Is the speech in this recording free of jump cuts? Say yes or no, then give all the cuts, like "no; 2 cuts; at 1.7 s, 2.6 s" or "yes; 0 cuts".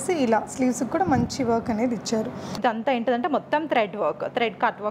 no; 1 cut; at 2.6 s